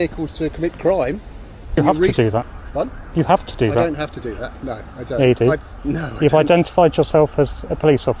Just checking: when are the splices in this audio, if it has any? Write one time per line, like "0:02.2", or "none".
0:01.8